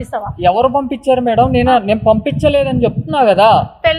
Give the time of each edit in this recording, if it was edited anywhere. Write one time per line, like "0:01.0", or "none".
none